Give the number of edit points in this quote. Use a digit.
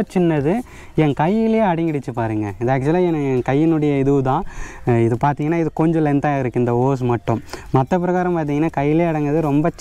0